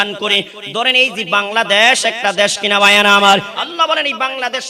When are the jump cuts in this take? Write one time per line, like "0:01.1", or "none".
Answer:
0:03.5